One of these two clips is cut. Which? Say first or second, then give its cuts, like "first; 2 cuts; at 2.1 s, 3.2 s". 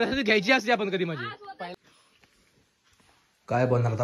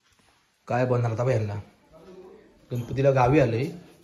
first; 1 cut; at 1.7 s